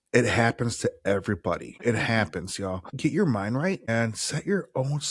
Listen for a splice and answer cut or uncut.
cut